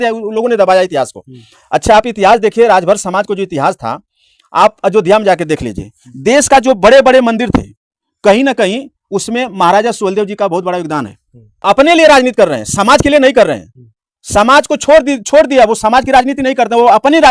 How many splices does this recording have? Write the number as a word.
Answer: one